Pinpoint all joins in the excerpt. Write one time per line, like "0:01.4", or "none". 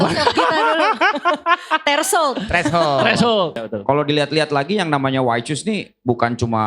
0:03.7

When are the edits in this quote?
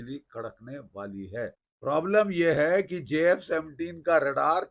0:01.7

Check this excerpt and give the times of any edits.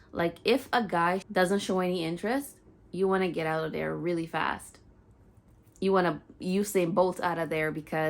0:01.2

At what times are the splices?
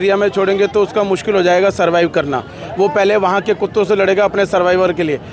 none

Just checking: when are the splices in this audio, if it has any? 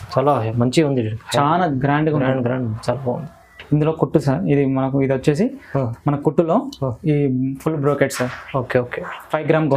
none

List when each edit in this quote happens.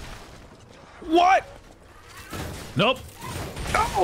none

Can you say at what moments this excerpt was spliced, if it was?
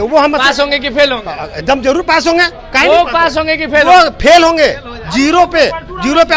none

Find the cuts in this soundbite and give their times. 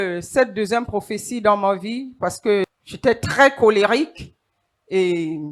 0:02.7

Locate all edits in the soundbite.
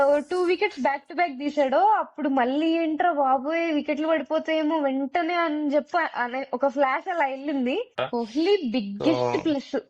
0:07.9

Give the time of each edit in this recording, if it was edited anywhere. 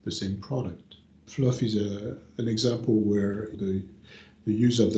0:03.5

